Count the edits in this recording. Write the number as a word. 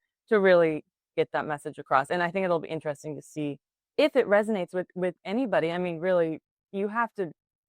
zero